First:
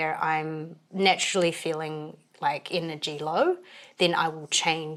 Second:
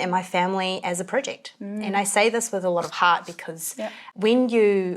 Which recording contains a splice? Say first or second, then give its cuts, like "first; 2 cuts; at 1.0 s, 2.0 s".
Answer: second; 1 cut; at 4.0 s